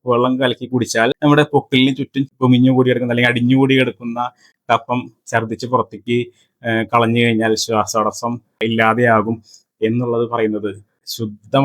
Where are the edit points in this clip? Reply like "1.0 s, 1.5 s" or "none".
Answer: none